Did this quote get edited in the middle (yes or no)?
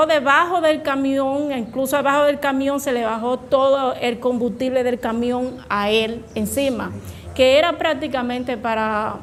no